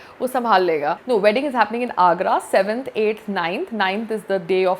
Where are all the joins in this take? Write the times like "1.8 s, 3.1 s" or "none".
1.0 s